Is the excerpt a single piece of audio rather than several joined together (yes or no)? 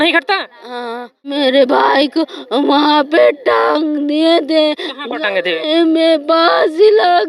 no